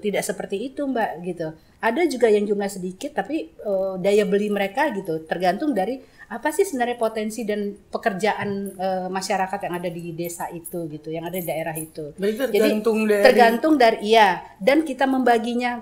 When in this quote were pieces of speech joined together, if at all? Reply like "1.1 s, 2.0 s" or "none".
none